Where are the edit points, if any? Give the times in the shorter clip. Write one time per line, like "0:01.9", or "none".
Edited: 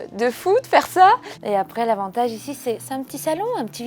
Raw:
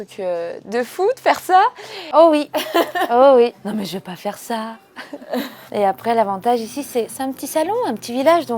0:01.3